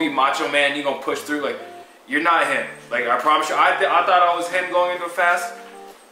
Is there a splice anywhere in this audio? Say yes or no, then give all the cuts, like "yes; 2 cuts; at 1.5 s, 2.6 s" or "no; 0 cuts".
no; 0 cuts